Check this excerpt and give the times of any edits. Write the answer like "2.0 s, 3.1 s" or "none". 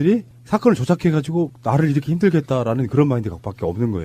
2.1 s